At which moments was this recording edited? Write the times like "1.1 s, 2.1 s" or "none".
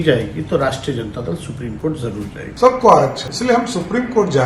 2.4 s, 3.3 s

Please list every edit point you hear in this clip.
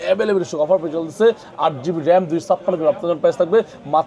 none

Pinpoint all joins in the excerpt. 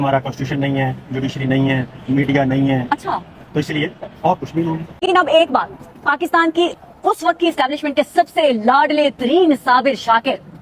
none

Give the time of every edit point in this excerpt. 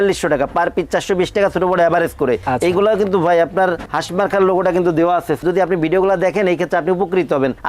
2.4 s, 3.9 s, 5.4 s

